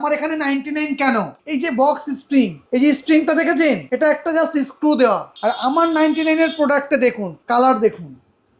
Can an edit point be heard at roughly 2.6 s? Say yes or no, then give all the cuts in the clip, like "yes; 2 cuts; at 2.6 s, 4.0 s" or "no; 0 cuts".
yes; 5 cuts; at 1.4 s, 2.6 s, 3.9 s, 5.3 s, 7.3 s